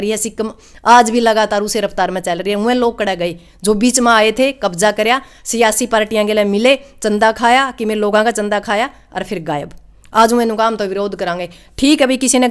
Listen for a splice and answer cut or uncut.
uncut